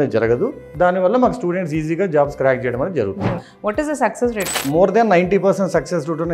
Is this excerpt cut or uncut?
cut